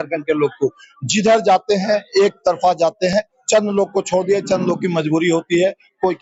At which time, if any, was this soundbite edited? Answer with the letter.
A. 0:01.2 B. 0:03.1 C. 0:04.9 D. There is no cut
D